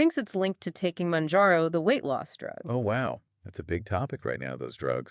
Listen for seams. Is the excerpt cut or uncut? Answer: uncut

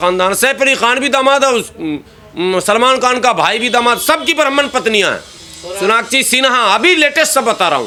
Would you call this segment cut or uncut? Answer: uncut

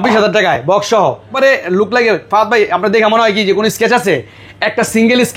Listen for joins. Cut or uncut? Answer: cut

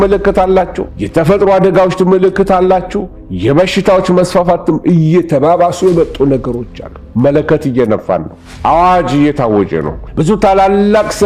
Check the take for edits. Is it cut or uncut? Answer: cut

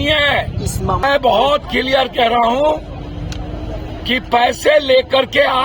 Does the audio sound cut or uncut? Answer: cut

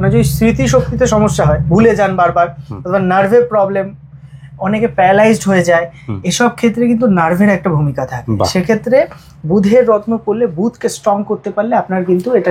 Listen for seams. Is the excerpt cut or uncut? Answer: uncut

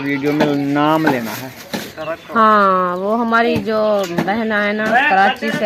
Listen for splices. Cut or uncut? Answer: uncut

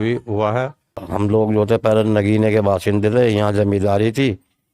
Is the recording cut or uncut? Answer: cut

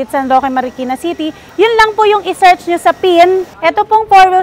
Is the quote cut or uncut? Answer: cut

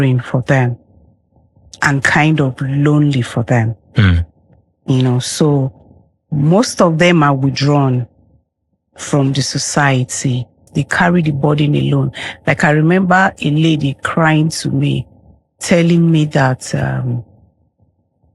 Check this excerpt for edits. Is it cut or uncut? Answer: cut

